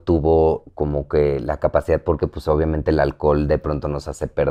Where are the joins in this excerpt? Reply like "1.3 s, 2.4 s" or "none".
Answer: none